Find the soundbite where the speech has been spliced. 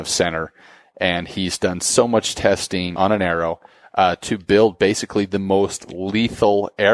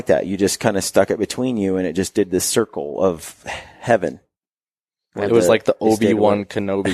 first; 1 cut; at 2.9 s

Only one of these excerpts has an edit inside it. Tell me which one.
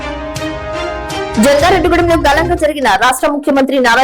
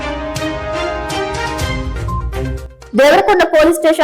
first; 1 cut; at 1.3 s

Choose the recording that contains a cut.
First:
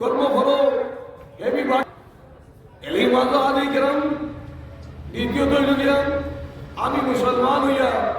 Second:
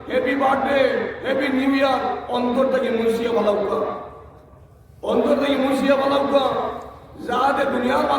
first; 1 cut; at 1.8 s

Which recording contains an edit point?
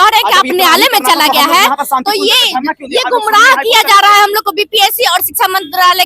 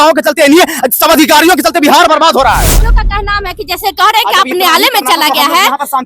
second; 1 cut; at 2.9 s

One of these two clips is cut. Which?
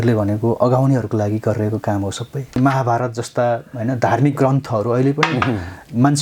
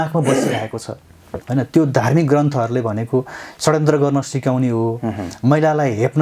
first; 1 cut; at 2.5 s

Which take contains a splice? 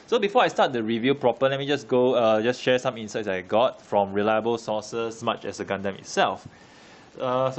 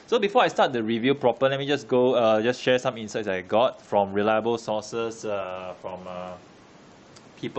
second; 1 cut; at 5.2 s

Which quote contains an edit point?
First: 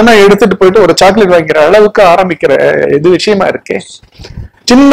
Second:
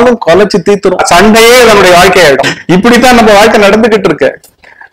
second; 2 cuts; at 1.0 s, 2.5 s

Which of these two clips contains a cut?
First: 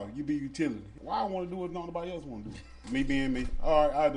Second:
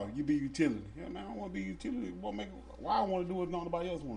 first; 2 cuts; at 0.9 s, 2.7 s

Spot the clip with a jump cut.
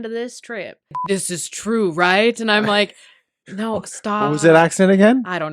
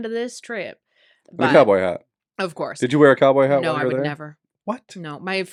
first; 1 cut; at 1.0 s

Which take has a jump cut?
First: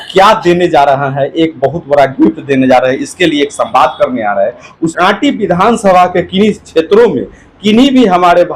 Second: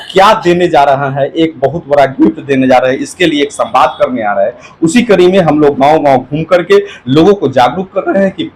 first; 1 cut; at 4.8 s

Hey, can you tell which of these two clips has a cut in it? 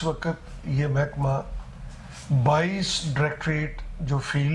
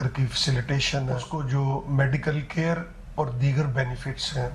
second; 1 cut; at 1.2 s

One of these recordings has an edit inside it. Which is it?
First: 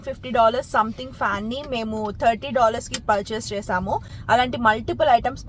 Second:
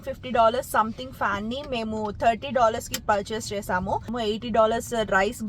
second; 1 cut; at 4.1 s

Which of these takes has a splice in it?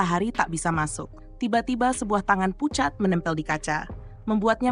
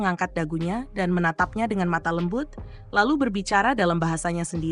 first; 1 cut; at 1.2 s

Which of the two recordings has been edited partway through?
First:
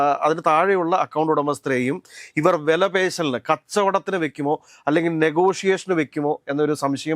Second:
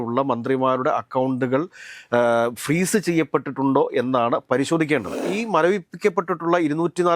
second; 1 cut; at 5.3 s

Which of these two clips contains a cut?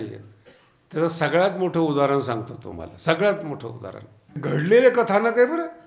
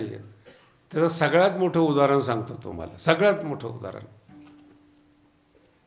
first; 1 cut; at 4.4 s

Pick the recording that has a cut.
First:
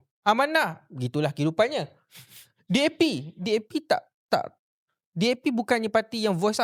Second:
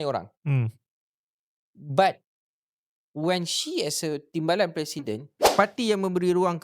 second; 1 cut; at 5.3 s

